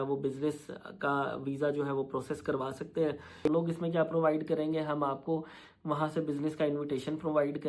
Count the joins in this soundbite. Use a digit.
1